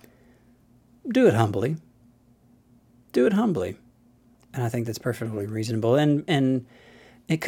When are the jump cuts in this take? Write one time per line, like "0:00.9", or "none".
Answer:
none